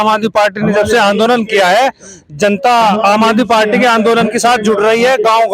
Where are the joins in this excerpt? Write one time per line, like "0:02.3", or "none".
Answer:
none